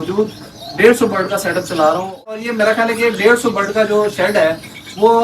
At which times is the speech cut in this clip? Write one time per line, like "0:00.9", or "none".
0:02.4

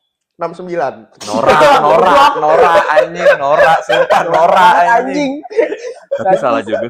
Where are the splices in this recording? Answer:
none

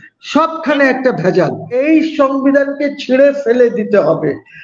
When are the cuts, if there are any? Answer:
0:01.8

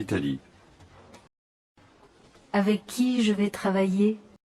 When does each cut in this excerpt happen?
0:01.0

